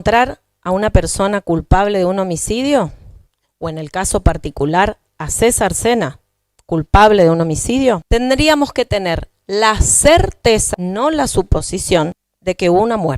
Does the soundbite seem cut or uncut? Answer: cut